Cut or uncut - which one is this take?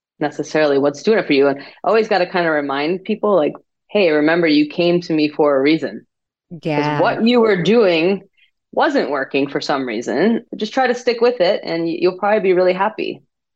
cut